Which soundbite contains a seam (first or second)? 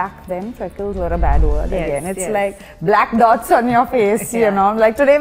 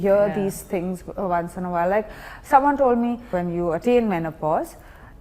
second